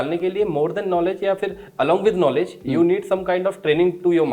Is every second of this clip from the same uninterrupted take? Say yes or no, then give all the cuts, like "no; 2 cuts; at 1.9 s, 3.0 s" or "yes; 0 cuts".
yes; 0 cuts